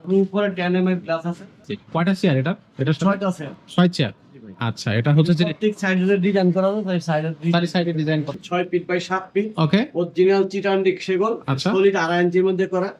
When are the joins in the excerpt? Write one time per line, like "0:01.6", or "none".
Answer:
0:01.6
0:08.4